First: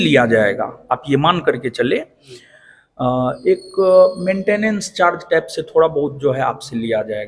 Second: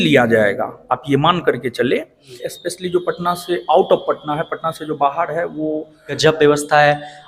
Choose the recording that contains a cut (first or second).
second